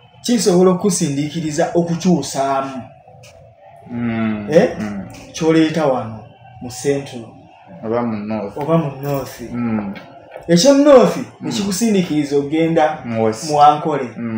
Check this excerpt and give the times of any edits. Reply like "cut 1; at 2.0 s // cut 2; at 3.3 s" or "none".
none